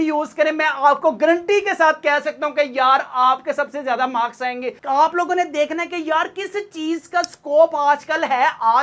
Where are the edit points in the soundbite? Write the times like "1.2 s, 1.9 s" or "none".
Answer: 4.8 s